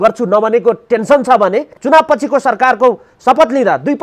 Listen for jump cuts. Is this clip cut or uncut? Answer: cut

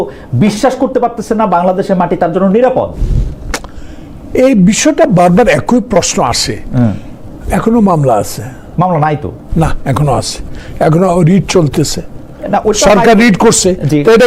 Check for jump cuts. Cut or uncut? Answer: uncut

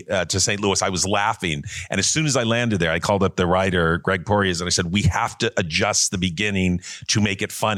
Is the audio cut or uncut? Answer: uncut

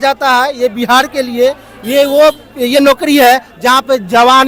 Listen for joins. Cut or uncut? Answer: uncut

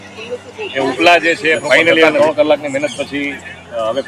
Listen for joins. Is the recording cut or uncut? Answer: uncut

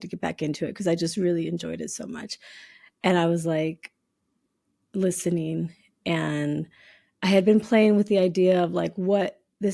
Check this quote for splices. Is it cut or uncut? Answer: uncut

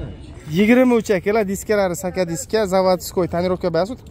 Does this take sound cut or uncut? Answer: uncut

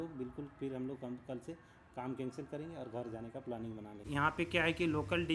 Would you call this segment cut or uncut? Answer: cut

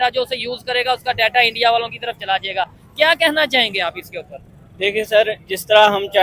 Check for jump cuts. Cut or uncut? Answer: uncut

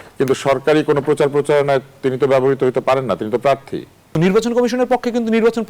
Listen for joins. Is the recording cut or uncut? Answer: cut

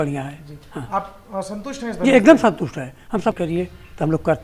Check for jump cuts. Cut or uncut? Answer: cut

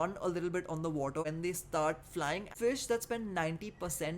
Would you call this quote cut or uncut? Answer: cut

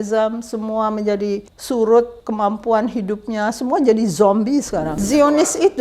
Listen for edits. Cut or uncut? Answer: cut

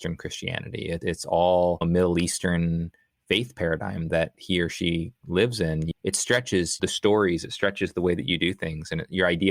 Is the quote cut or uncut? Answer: cut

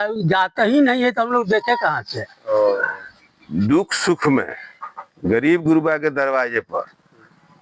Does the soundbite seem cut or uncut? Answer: cut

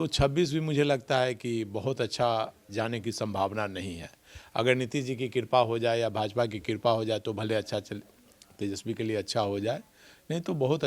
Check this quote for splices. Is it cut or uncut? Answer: uncut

